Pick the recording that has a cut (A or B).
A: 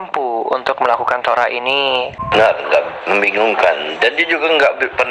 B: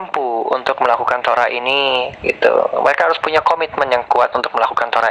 A